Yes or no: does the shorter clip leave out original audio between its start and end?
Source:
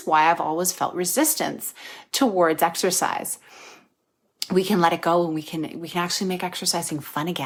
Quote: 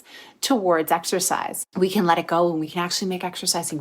yes